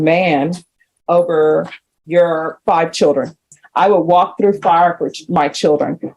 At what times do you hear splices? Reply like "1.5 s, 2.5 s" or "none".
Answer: 3.6 s